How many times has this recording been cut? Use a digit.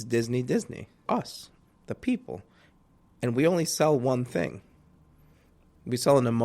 1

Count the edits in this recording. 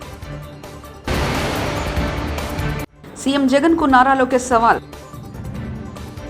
2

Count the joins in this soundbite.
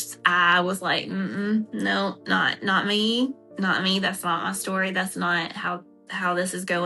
0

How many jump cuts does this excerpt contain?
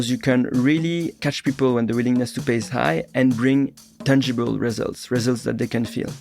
1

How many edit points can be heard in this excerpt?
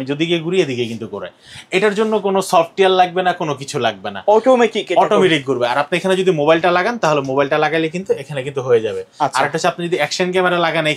0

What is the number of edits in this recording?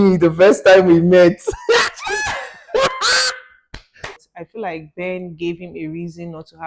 1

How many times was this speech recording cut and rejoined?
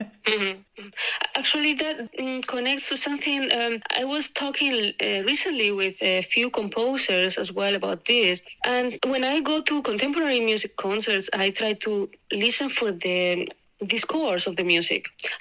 1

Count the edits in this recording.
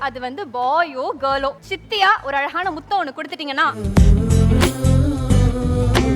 2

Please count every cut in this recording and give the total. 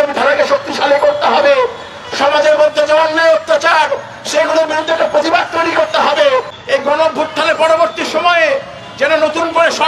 1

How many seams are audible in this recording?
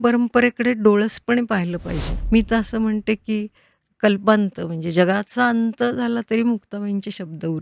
1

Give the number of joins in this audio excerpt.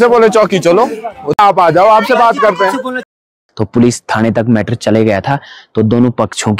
1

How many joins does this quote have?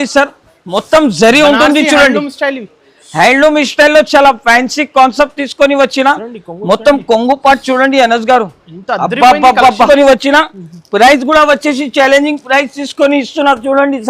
1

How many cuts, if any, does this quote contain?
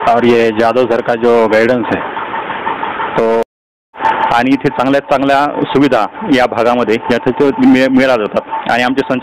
1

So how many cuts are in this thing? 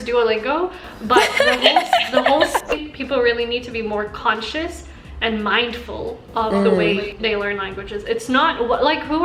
1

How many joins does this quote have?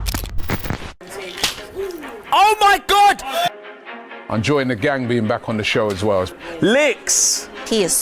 1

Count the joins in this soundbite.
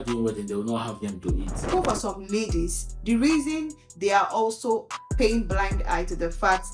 1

